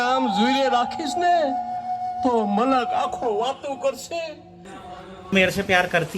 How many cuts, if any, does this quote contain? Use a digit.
1